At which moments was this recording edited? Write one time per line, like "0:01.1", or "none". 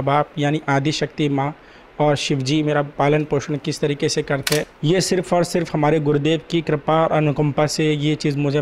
0:04.6